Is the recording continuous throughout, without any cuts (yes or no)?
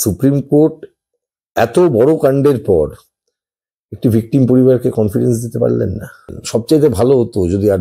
no